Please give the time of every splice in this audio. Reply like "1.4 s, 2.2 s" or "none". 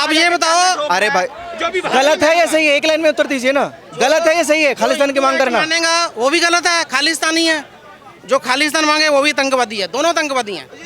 none